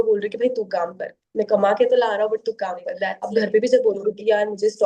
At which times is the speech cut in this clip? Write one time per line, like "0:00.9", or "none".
0:03.1